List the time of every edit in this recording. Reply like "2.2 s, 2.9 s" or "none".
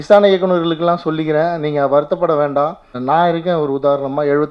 3.0 s